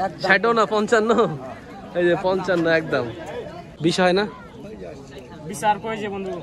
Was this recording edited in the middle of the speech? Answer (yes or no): yes